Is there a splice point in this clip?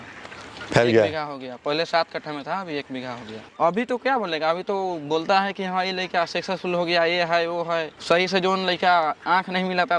yes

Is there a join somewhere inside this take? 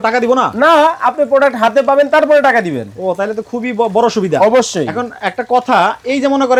no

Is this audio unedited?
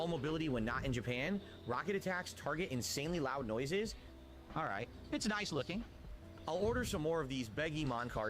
no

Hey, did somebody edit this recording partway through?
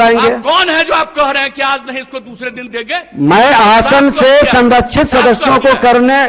no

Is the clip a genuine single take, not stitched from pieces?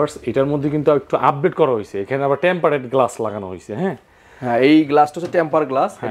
yes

